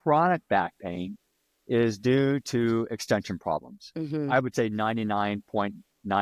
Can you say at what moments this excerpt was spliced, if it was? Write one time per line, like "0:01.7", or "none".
none